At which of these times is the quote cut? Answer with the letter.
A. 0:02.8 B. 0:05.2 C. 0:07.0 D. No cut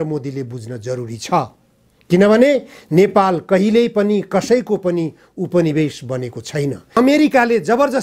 C